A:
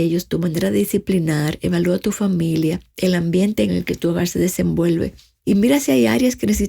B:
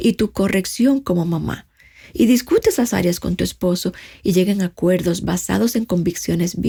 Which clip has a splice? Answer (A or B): A